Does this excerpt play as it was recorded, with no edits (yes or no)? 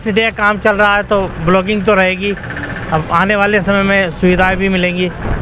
yes